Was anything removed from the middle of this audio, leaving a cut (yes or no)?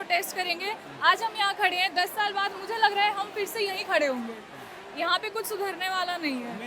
no